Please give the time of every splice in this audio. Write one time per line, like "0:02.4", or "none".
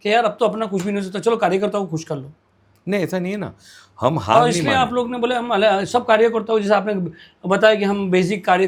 none